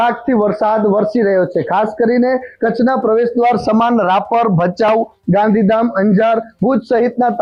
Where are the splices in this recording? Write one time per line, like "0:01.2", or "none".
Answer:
none